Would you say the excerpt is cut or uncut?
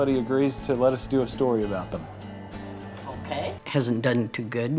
cut